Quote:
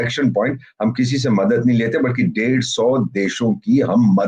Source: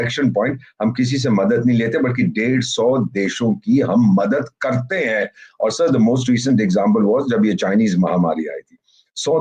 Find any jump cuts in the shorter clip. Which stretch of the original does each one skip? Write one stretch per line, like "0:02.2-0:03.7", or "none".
none